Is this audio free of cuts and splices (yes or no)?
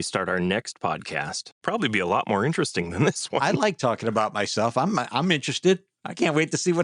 no